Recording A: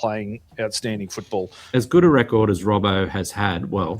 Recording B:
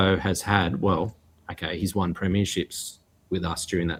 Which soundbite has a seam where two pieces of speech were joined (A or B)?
A